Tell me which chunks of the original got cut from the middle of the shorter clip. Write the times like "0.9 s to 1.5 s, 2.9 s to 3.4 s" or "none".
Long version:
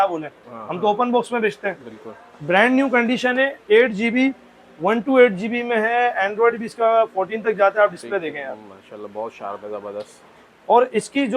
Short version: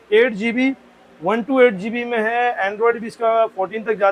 none